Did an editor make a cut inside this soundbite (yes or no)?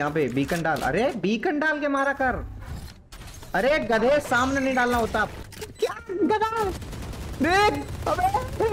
yes